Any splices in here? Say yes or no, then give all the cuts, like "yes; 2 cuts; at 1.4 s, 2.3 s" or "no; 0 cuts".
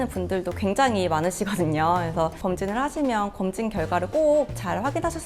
yes; 1 cut; at 2.4 s